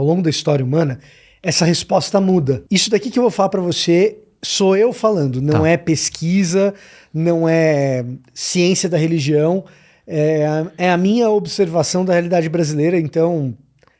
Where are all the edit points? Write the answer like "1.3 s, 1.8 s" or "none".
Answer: 2.6 s